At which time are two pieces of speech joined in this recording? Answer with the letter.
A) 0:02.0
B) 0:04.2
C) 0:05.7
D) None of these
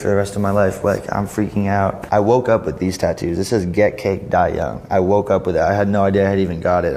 A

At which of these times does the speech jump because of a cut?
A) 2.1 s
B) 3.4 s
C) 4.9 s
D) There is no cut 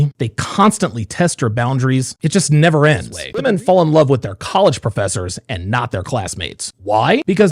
B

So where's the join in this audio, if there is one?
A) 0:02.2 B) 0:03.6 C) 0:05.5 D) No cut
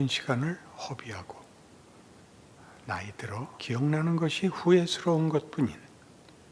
B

